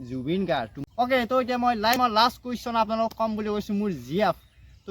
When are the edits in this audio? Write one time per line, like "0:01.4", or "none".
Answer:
0:00.8
0:01.9